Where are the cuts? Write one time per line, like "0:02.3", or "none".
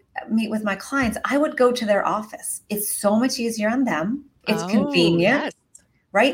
0:04.3